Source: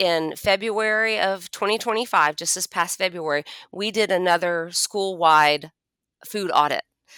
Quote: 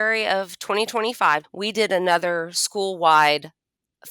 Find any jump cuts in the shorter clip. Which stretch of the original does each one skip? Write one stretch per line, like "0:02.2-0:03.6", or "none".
0:02.4-0:03.7